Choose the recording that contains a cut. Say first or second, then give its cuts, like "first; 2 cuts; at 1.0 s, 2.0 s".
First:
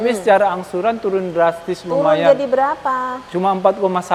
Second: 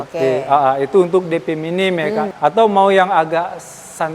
second; 1 cut; at 2.3 s